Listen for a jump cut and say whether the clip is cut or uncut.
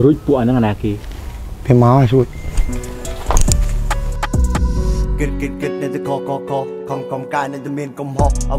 uncut